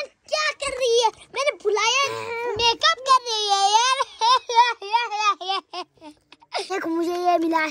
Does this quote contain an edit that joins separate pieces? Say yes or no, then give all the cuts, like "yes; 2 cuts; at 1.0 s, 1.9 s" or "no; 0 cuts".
yes; 1 cut; at 6.7 s